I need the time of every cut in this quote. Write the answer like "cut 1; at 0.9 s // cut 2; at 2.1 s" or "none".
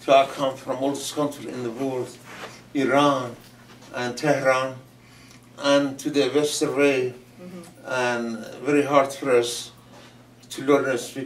none